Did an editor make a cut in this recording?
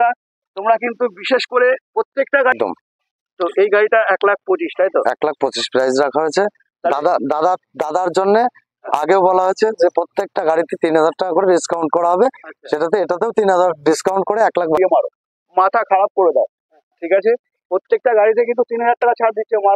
yes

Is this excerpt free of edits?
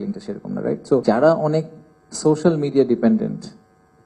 no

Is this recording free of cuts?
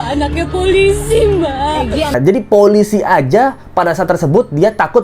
no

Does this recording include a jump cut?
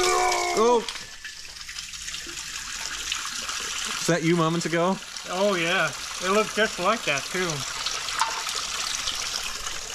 no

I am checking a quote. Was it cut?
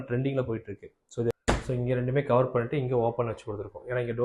yes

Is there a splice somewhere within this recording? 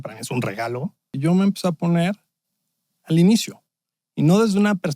yes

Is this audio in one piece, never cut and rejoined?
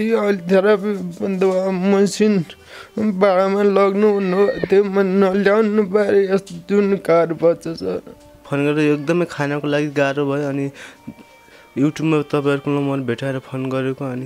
no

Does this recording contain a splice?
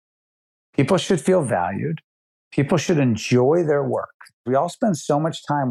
yes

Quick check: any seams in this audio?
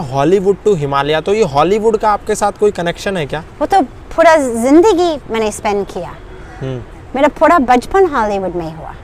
no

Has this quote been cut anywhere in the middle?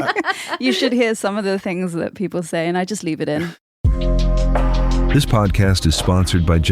yes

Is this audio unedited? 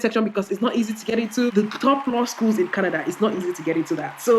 no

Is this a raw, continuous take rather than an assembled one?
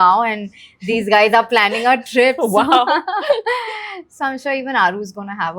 yes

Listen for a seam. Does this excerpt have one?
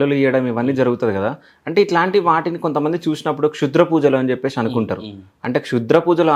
no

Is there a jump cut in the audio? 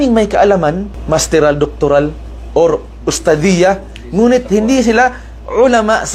no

